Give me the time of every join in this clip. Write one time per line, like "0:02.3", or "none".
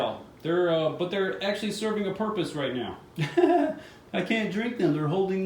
none